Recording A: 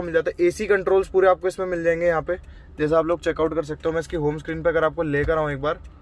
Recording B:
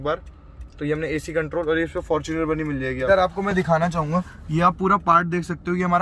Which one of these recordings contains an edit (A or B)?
B